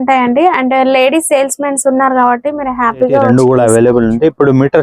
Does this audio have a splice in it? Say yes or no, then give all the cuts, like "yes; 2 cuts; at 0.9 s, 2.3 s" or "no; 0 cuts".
yes; 1 cut; at 3.3 s